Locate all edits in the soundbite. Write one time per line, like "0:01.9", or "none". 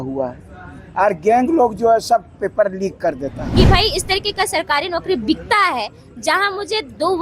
0:03.4

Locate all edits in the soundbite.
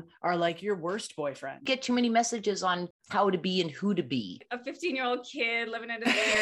0:01.7
0:03.0
0:04.4

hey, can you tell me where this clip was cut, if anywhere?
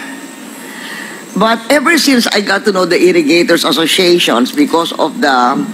none

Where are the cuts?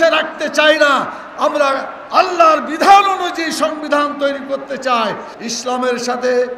0:05.3

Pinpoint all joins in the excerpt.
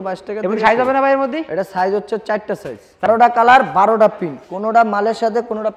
0:03.1

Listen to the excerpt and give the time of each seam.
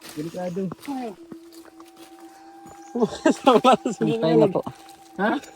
0:01.2
0:02.9

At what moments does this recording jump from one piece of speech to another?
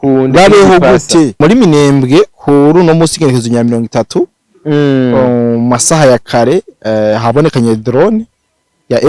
0:01.4

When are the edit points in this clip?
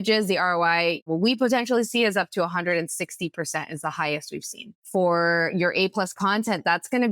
0:01.1
0:04.7

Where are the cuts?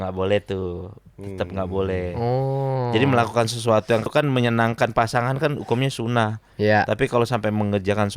0:04.1

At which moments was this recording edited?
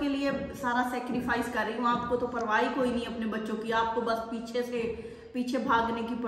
none

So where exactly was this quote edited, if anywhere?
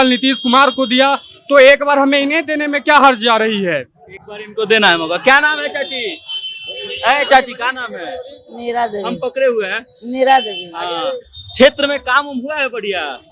none

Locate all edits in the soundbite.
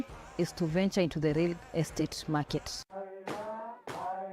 0:02.8

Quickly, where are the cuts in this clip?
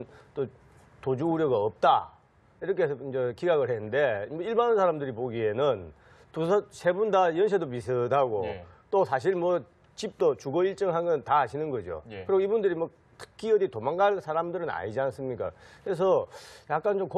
none

